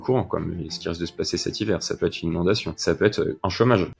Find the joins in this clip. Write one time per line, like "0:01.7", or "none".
0:03.1